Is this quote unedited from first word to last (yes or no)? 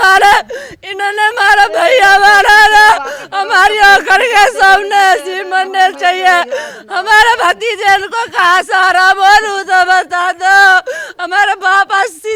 yes